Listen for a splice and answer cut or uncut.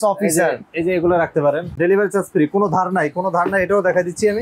cut